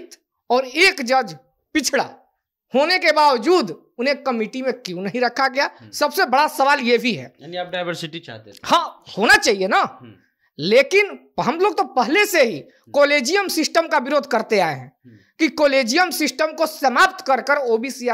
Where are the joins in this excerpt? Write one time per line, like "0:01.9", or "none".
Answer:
none

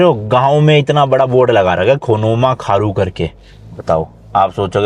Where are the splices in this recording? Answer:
none

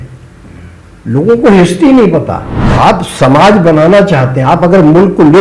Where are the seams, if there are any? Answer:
0:02.6

